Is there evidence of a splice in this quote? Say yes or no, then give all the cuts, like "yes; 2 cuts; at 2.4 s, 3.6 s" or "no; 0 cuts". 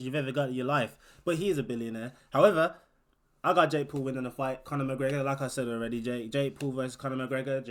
no; 0 cuts